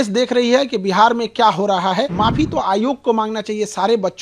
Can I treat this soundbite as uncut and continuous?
no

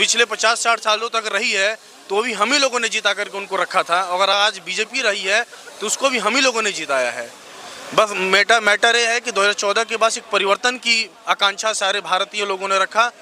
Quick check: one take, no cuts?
yes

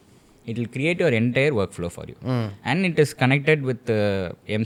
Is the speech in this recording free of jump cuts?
yes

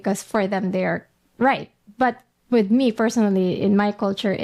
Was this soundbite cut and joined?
no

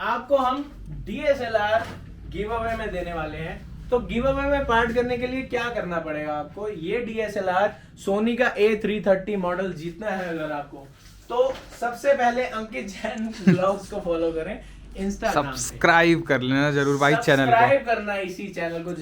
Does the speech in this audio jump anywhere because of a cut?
no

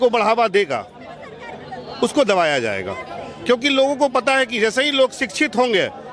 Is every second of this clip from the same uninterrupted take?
yes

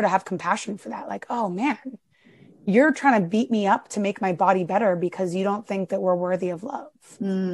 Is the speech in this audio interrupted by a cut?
no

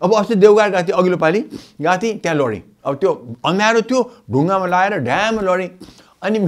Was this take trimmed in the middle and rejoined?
no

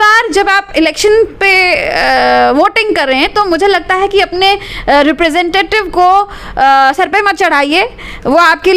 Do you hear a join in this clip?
no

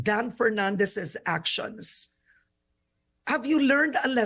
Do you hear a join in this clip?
no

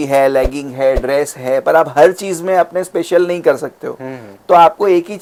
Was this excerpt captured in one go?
yes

